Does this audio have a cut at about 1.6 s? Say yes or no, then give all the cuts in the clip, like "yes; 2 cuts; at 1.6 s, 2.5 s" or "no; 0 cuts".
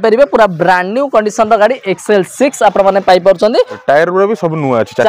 no; 1 cut; at 3.8 s